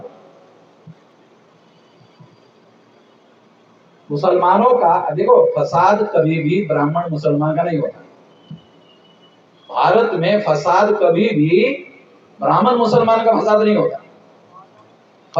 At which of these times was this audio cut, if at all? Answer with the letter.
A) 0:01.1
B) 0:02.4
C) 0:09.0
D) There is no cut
D